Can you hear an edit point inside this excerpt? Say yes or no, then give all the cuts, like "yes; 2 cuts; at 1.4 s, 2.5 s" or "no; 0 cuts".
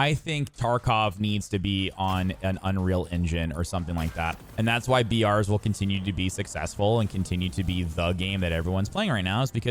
yes; 1 cut; at 4.4 s